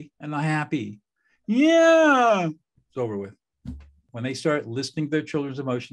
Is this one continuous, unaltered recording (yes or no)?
no